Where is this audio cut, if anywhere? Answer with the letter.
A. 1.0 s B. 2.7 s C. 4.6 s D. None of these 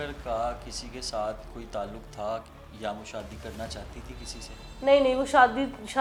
D